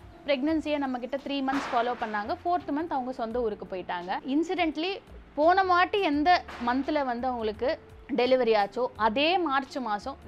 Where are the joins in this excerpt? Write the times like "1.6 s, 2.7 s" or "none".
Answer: 4.2 s